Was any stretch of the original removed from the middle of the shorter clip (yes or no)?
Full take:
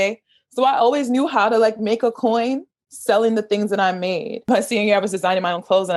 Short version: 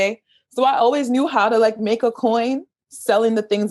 no